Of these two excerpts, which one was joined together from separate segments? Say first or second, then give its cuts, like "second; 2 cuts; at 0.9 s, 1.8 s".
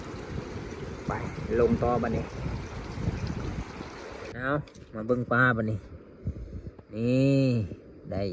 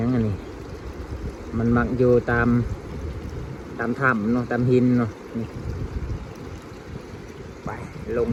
first; 1 cut; at 4.3 s